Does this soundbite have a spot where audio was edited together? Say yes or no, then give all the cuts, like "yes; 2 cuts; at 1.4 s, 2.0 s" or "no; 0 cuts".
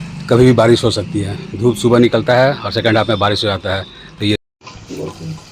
yes; 1 cut; at 4.4 s